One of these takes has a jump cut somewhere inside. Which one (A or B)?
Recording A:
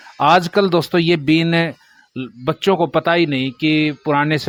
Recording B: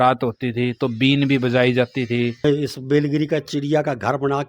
B